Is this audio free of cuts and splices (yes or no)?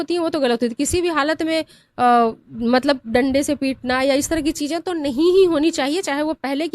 yes